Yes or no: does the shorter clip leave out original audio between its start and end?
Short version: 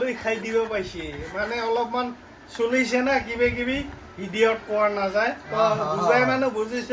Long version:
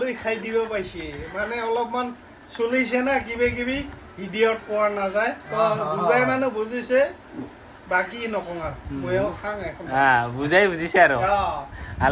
no